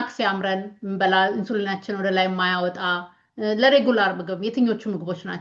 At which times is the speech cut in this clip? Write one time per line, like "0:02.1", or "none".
none